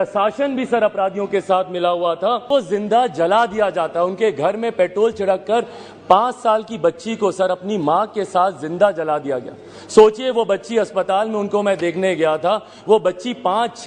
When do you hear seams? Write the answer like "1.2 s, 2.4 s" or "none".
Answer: 2.4 s